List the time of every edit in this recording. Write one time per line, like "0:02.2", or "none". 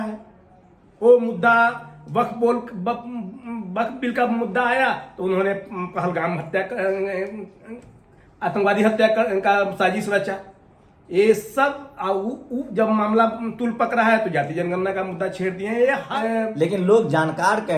0:16.0